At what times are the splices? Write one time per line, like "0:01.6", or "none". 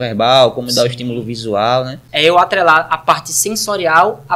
0:02.0